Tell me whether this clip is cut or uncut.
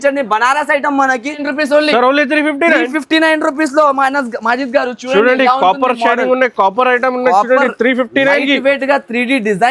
cut